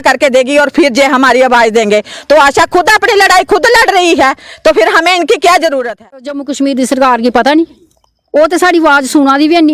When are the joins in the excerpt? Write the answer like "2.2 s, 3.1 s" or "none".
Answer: 6.4 s